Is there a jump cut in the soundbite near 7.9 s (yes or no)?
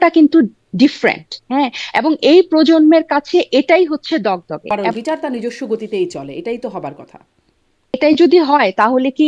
yes